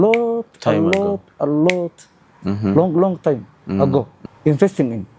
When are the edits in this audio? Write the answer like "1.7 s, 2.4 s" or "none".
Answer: 4.2 s